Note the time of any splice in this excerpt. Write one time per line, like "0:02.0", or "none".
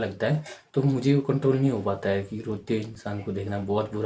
none